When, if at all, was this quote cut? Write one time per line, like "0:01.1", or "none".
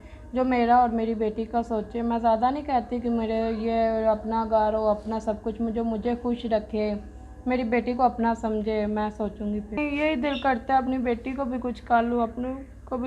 0:09.8